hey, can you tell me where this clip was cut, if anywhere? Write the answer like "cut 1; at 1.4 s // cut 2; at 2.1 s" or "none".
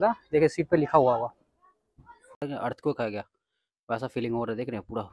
cut 1; at 2.4 s